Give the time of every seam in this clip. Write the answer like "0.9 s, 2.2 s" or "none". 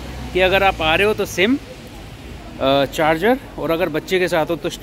none